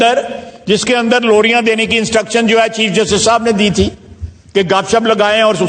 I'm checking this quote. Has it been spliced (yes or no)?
no